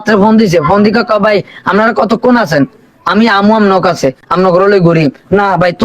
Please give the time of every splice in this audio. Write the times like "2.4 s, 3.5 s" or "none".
4.2 s